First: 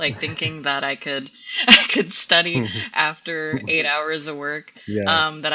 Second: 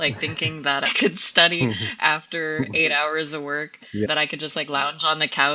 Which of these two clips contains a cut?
second; 2 cuts; at 0.9 s, 4.1 s

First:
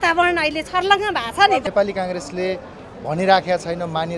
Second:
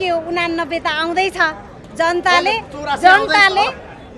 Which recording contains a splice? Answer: first; 1 cut; at 1.6 s

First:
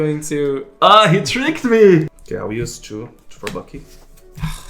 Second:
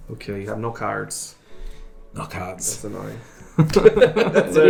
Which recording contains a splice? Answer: first; 1 cut; at 2.1 s

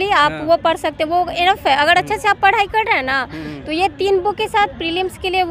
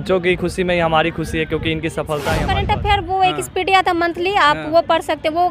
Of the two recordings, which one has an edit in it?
second; 1 cut; at 2.5 s

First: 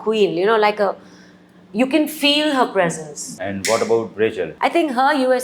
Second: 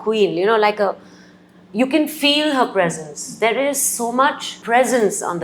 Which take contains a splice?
first; 2 cuts; at 3.2 s, 4.5 s

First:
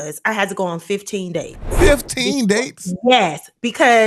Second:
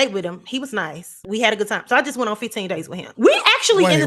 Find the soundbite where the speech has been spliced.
second; 2 cuts; at 1.2 s, 3.0 s

